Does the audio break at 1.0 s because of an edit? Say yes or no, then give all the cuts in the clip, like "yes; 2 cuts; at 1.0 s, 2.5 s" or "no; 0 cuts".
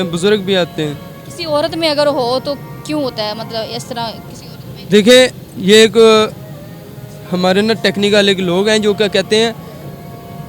no; 0 cuts